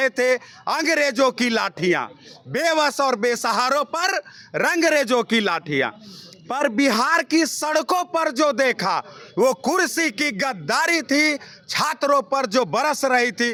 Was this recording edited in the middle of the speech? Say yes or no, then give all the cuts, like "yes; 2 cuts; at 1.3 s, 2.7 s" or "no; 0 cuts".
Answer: no; 0 cuts